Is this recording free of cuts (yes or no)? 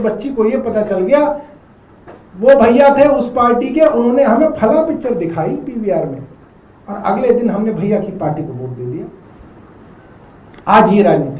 yes